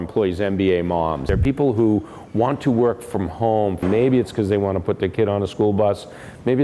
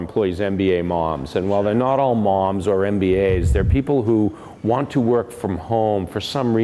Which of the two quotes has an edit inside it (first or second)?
first